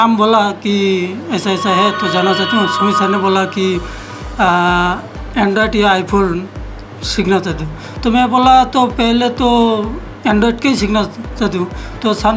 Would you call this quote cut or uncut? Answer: uncut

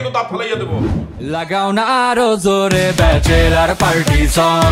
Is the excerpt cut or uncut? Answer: cut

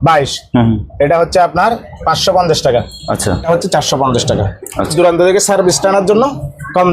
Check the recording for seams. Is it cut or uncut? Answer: cut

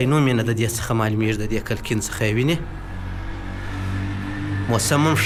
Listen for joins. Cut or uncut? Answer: uncut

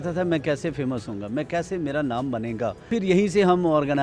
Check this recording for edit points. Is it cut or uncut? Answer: cut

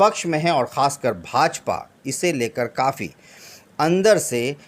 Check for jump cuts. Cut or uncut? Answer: uncut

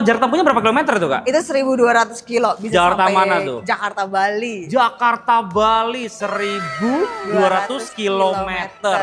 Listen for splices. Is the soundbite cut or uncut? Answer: uncut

